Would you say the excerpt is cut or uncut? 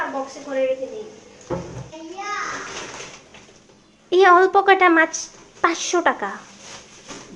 cut